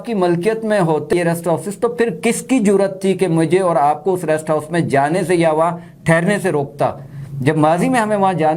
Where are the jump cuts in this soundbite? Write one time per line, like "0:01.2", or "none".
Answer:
0:01.1